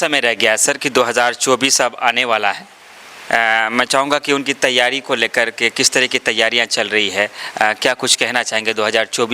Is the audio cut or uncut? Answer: uncut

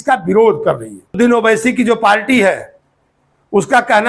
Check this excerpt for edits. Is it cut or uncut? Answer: cut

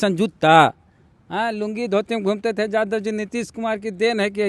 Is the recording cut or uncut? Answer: uncut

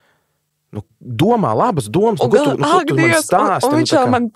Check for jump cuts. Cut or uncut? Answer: cut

